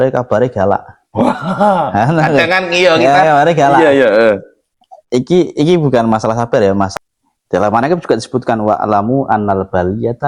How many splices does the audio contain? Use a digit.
1